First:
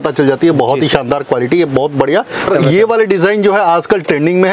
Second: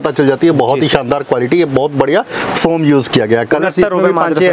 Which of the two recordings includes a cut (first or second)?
first